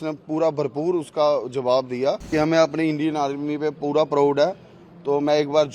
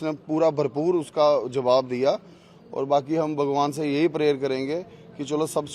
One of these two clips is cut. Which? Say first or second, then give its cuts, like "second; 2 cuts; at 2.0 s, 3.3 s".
first; 1 cut; at 2.3 s